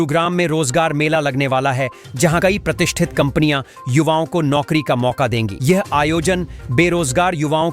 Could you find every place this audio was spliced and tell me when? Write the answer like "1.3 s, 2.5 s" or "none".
none